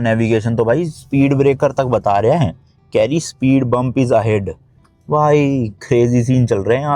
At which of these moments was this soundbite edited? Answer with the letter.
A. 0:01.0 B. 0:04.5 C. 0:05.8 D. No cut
D